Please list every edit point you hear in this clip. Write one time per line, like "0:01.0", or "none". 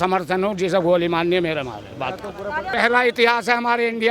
0:02.6